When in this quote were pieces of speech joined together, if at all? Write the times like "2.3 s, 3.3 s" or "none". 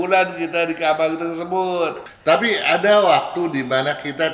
2.0 s